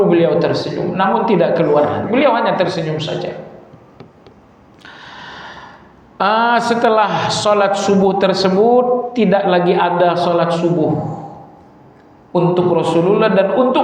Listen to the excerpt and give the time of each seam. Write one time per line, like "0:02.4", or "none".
none